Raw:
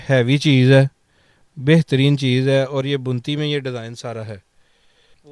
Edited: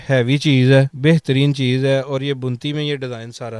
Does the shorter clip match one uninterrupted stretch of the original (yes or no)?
no